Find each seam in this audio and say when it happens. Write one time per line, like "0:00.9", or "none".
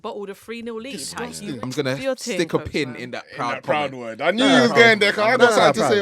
0:01.6